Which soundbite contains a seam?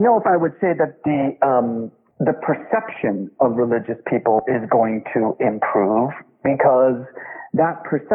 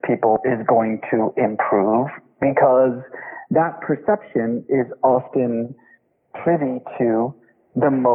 first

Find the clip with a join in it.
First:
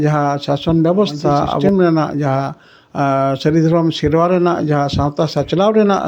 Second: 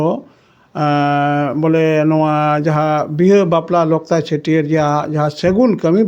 first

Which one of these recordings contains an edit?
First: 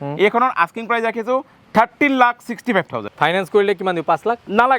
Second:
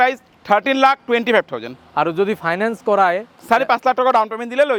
first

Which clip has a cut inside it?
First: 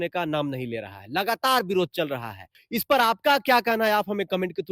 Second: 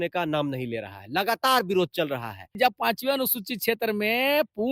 second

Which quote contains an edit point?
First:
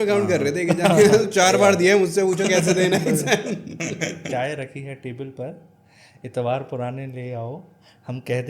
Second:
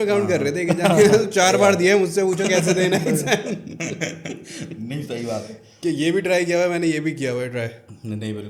first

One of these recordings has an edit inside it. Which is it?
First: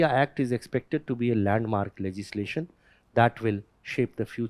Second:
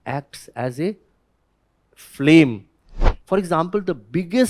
second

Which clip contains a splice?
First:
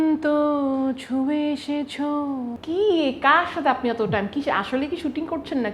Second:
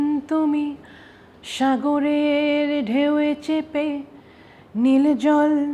first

